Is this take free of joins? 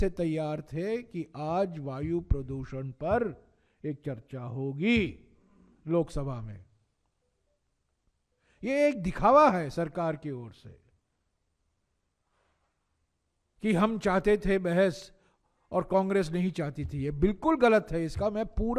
yes; 0 cuts

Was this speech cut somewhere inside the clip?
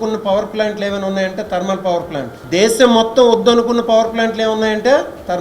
yes; 1 cut; at 2.3 s

